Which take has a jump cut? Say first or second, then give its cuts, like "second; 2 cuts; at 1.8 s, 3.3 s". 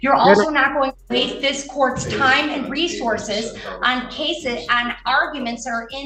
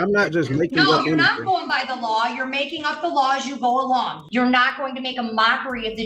second; 1 cut; at 4.2 s